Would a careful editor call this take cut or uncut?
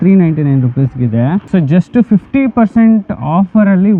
cut